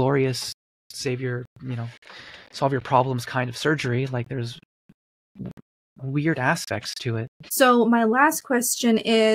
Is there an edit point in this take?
no; 0 cuts

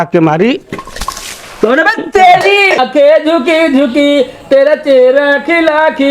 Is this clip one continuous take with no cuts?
no; 1 cut; at 2.7 s

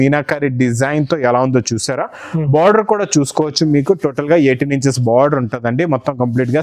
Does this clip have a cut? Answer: no; 0 cuts

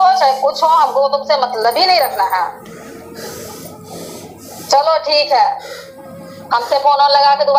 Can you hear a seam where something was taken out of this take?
no; 0 cuts

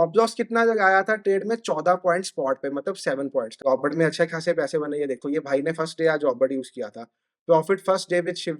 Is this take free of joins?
no; 1 cut; at 3.5 s

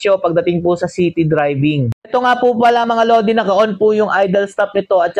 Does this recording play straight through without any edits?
yes; 0 cuts

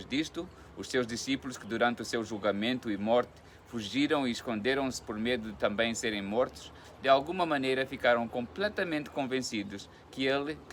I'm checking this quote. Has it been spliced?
no; 0 cuts

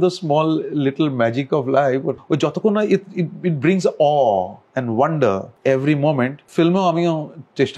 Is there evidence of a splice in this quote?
yes; 4 cuts; at 2.2 s, 4.6 s, 5.5 s, 6.4 s

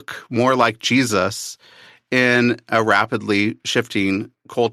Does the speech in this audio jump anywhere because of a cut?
no; 0 cuts

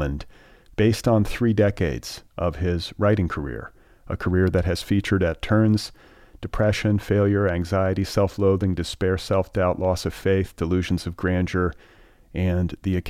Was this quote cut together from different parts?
no; 0 cuts

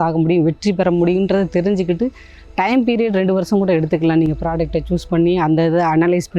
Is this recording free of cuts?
yes; 0 cuts

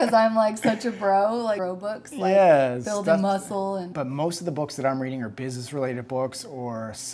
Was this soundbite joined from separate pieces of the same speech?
yes; 2 cuts; at 1.6 s, 3.9 s

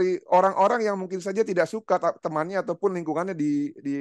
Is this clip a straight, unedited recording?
yes; 0 cuts

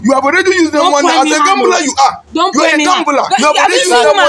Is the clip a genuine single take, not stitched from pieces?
yes; 0 cuts

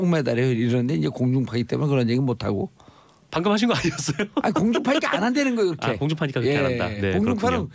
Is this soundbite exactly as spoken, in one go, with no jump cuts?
yes; 0 cuts

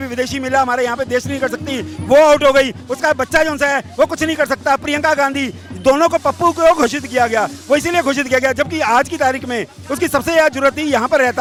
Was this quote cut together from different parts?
no; 0 cuts

